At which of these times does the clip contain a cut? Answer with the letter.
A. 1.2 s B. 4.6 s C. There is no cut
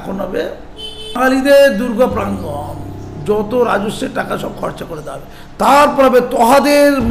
A